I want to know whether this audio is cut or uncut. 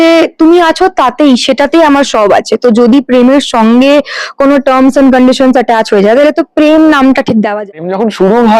cut